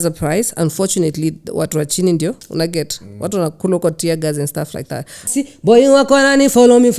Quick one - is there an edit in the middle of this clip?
yes; 1 cut; at 5.3 s

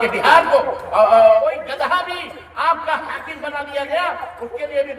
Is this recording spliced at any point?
yes; 1 cut; at 1.4 s

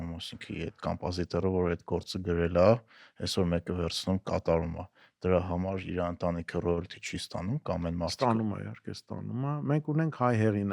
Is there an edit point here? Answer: no; 0 cuts

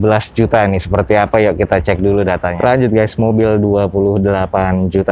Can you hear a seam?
yes; 1 cut; at 2.5 s

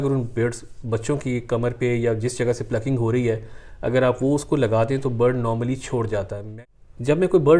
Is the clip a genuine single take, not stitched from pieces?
no; 1 cut; at 6.5 s

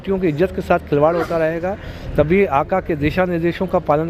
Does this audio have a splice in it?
no; 0 cuts

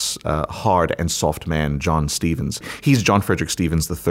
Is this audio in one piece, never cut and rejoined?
yes; 0 cuts

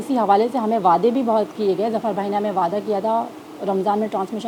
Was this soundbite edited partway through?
no; 0 cuts

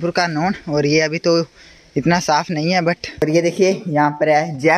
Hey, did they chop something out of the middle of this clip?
yes; 1 cut; at 3.2 s

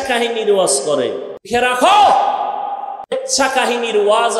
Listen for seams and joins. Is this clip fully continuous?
no; 2 cuts; at 1.5 s, 3.1 s

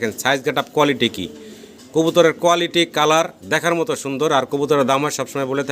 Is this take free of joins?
yes; 0 cuts

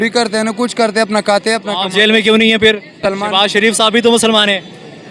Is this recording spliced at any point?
yes; 1 cut; at 3.0 s

